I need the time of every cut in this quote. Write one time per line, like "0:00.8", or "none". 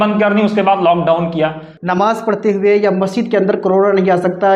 0:01.7

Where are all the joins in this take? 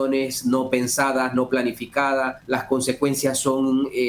0:02.4

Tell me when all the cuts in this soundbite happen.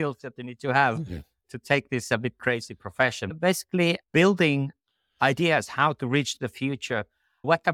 0:03.3

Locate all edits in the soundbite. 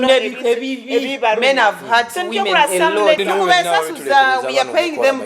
0:03.2

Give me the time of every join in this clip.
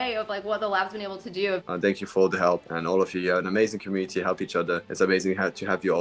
0:01.6
0:02.7
0:04.9

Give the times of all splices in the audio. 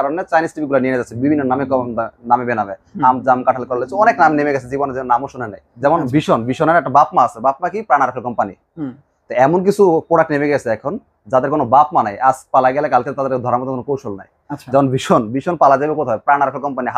0:05.6

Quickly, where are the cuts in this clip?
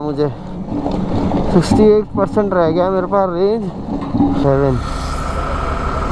0:04.4

